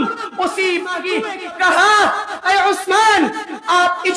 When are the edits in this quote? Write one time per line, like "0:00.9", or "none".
0:01.0